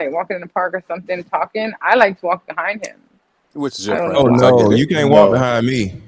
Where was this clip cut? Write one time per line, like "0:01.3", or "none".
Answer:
none